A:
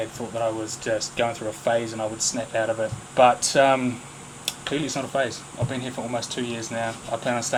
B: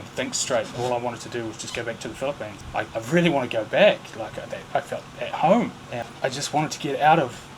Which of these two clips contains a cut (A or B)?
B